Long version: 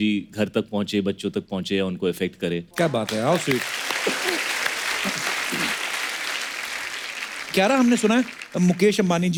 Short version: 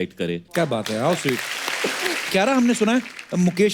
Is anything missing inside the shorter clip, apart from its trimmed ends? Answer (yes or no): yes